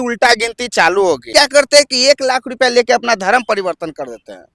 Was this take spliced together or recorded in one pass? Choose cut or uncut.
cut